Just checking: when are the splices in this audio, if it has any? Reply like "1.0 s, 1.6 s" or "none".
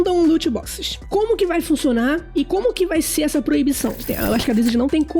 0.9 s, 2.5 s, 4.1 s